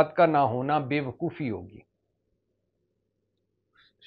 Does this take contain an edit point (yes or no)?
no